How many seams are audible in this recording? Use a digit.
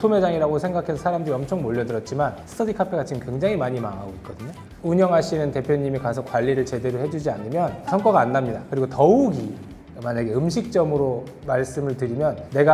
0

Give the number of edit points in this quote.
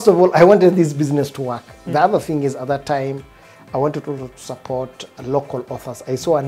1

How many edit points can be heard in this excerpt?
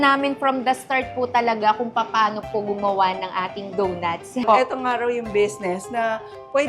1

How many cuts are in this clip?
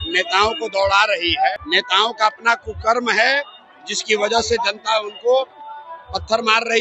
1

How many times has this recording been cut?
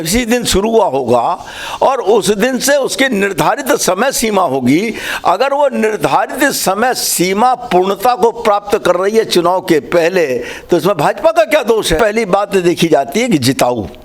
1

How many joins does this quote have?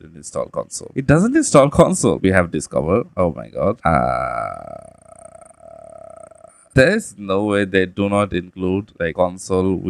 1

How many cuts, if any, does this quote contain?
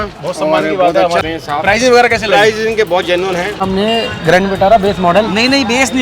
2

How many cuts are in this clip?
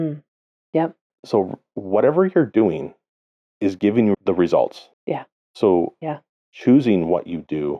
3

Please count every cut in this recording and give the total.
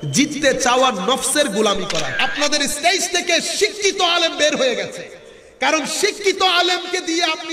1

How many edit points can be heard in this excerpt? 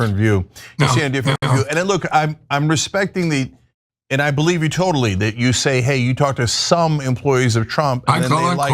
1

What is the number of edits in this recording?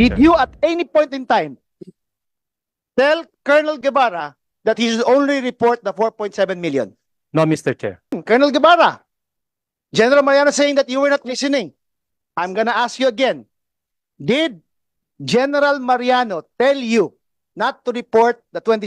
1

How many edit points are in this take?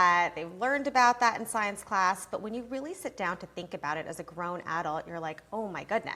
0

